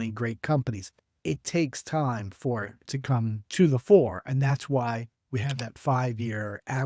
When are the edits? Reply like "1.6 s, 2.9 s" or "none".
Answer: 3.1 s